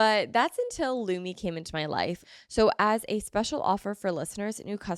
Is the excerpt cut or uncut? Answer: cut